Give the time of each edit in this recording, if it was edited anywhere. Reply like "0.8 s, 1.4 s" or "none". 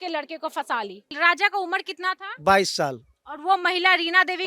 1.1 s